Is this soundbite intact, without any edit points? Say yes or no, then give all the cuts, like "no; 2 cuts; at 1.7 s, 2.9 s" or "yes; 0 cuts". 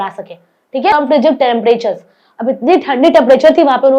no; 1 cut; at 0.9 s